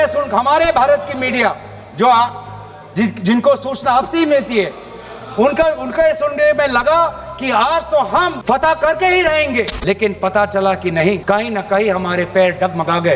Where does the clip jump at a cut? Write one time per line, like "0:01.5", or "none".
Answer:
0:08.4
0:09.7
0:11.2

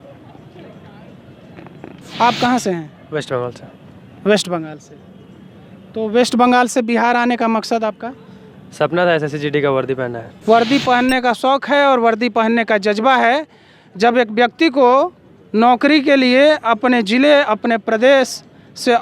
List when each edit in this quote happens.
0:10.3

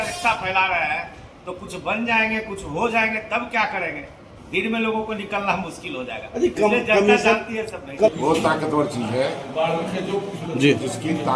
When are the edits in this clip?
0:08.1

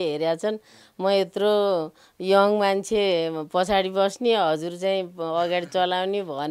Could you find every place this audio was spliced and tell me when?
none

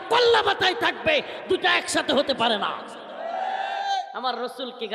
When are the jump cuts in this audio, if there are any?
none

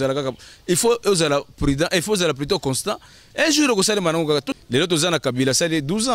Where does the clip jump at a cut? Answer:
0:04.5

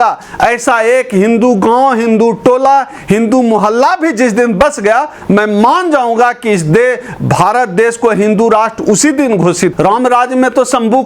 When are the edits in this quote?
0:09.7

